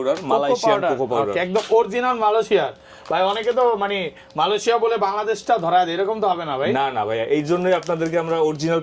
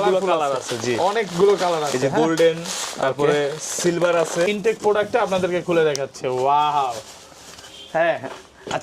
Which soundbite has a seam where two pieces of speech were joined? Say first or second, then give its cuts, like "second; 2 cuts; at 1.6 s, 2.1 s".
second; 1 cut; at 4.5 s